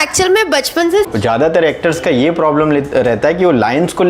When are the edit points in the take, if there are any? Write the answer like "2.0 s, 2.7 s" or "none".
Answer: 1.1 s